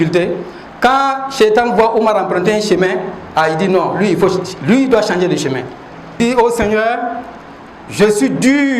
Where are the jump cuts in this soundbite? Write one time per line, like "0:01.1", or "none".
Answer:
0:06.2